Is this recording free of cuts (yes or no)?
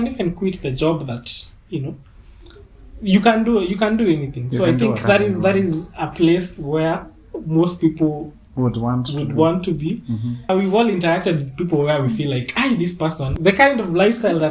no